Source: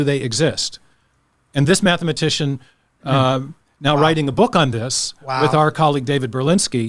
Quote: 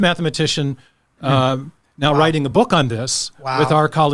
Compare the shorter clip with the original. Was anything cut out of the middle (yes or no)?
no